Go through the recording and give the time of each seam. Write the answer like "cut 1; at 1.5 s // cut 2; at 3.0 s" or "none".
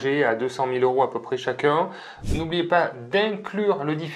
cut 1; at 2.1 s